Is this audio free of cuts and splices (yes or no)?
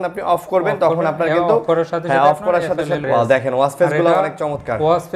no